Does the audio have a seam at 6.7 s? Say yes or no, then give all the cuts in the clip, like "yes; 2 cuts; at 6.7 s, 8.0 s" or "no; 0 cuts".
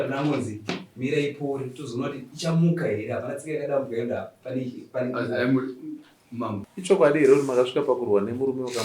yes; 1 cut; at 6.7 s